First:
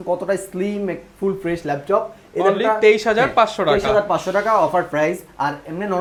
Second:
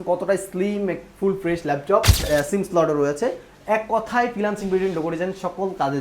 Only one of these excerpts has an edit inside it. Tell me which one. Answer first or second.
second